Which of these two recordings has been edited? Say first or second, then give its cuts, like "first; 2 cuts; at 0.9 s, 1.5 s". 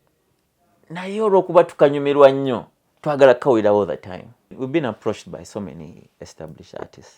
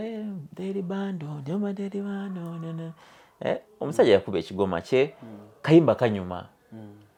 first; 1 cut; at 4.5 s